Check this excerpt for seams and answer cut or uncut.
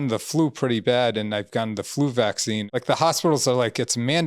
cut